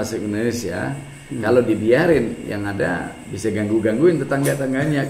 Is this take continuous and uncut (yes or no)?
yes